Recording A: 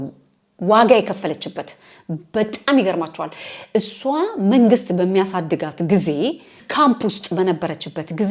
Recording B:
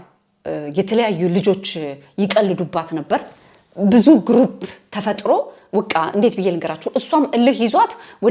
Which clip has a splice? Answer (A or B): A